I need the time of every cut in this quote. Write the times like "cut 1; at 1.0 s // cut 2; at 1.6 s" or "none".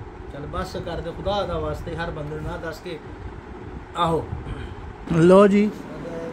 cut 1; at 5.0 s